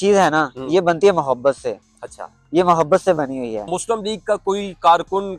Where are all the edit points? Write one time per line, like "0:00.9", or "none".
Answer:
0:03.7